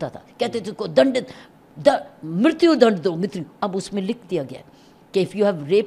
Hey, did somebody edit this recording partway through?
no; 0 cuts

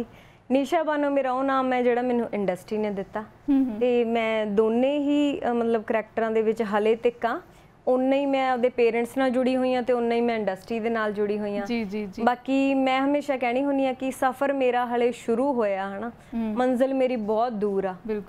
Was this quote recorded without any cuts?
yes; 0 cuts

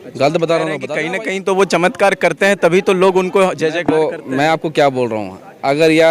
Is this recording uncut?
no; 1 cut; at 0.9 s

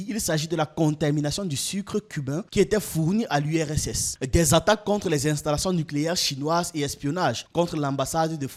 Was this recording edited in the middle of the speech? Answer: no; 0 cuts

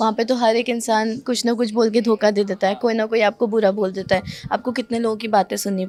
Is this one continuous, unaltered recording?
yes; 0 cuts

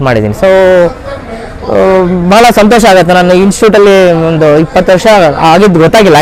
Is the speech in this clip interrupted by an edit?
no; 0 cuts

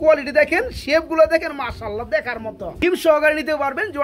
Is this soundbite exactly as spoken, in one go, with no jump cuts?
no; 1 cut; at 2.8 s

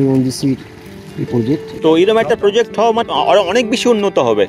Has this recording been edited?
yes; 2 cuts; at 1.8 s, 3.0 s

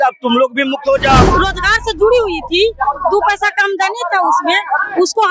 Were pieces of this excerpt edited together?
yes; 1 cut; at 1.2 s

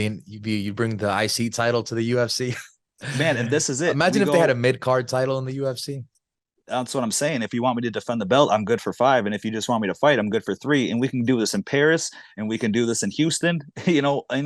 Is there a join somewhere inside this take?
no; 0 cuts

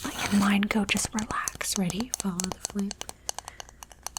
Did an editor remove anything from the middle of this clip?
no; 0 cuts

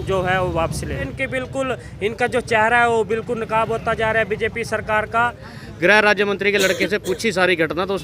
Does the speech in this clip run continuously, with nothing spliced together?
no; 2 cuts; at 1.2 s, 5.5 s

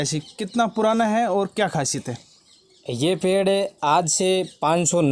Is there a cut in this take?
no; 0 cuts

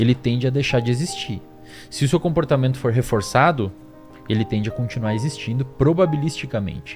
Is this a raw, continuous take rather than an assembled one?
yes; 0 cuts

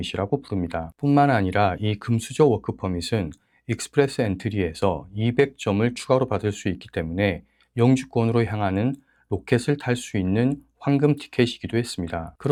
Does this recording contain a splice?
no; 0 cuts

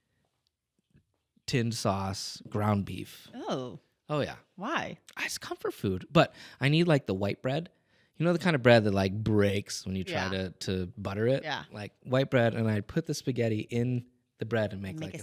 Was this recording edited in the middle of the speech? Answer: no; 0 cuts

